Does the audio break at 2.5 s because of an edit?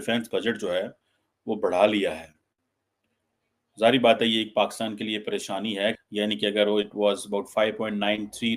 no; 1 cut; at 6.0 s

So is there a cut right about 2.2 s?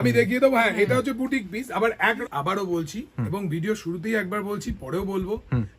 yes; 1 cut; at 2.2 s

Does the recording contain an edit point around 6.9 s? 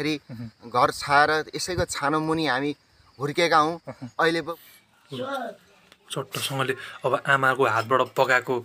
no; 1 cut; at 4.4 s

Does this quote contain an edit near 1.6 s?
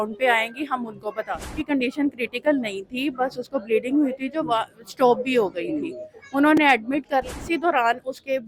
yes; 2 cuts; at 1.6 s, 7.4 s

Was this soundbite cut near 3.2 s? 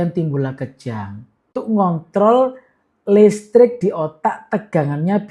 no; 1 cut; at 1.6 s

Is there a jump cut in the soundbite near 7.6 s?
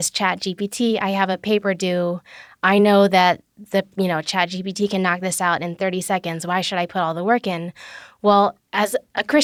no; 0 cuts

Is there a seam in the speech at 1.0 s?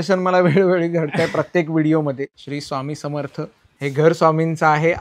no; 2 cuts; at 2.3 s, 3.6 s

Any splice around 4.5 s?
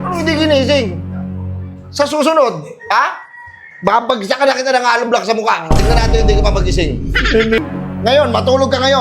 no; 1 cut; at 7.6 s

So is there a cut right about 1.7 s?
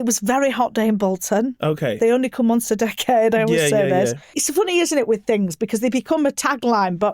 no; 1 cut; at 4.4 s

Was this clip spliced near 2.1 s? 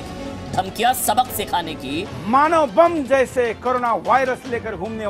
yes; 1 cut; at 2.1 s

